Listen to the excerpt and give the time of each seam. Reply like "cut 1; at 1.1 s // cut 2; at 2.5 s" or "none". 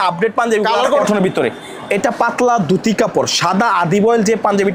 cut 1; at 1.0 s